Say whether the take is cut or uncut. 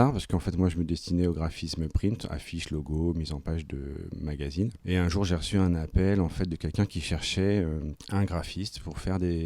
cut